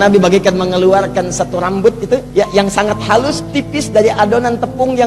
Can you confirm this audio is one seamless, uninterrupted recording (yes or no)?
no